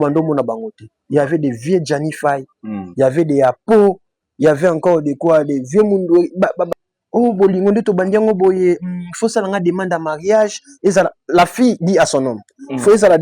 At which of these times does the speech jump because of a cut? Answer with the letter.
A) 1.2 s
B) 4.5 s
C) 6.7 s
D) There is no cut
C